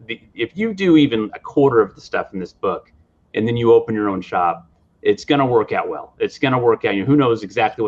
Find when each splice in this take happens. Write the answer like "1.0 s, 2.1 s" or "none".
none

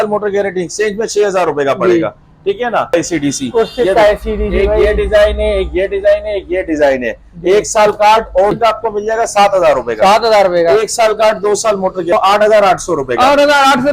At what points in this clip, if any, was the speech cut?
2.9 s, 8.6 s, 12.1 s

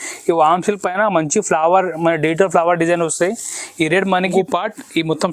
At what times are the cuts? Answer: 4.3 s

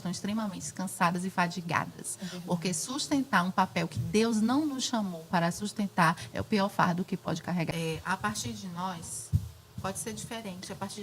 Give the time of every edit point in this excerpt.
7.7 s

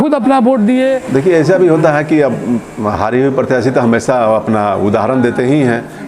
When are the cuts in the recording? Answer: 1.0 s

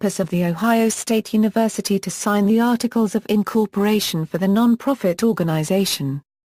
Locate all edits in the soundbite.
2.0 s

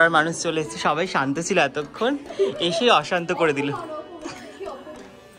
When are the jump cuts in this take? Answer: none

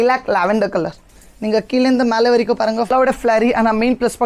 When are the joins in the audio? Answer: 2.9 s

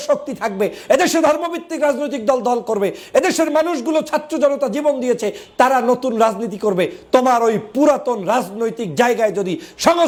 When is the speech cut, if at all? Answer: none

